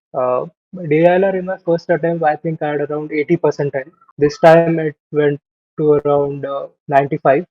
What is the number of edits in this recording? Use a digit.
1